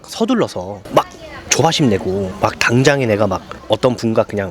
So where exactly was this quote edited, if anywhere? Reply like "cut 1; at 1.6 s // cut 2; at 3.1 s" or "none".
none